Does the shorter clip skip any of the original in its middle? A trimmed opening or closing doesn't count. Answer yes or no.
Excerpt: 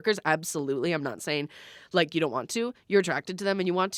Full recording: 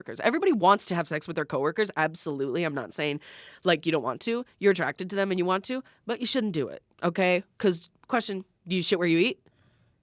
no